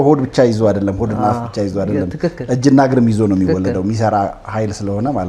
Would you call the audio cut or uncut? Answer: uncut